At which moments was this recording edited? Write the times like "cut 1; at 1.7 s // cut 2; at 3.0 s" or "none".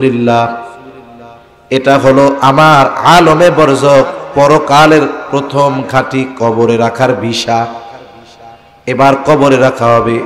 none